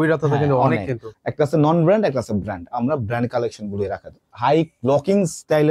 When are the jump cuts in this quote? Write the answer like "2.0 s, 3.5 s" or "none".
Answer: 1.1 s, 4.2 s